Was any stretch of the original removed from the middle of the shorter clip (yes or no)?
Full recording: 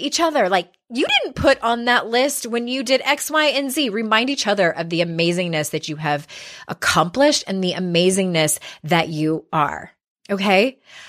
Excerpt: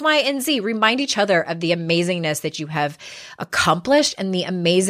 no